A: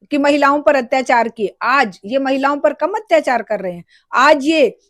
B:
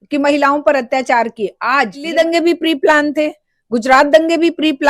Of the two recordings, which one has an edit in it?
B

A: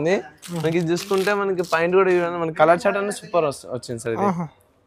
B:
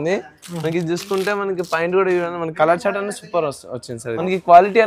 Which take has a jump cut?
B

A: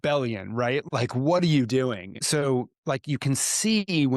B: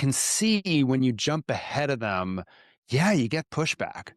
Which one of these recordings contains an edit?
A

